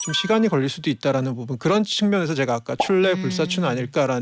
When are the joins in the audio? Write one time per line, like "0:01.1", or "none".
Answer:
none